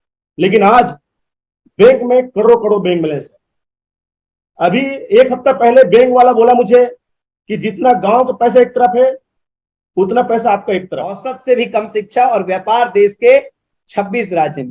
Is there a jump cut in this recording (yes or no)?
yes